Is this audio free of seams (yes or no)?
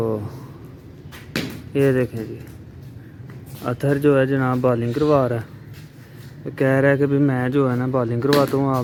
yes